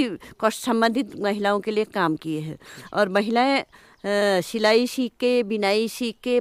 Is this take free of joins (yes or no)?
yes